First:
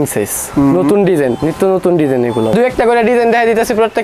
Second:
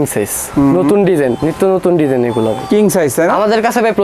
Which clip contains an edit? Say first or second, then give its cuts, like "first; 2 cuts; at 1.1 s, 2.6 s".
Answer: first; 1 cut; at 2.5 s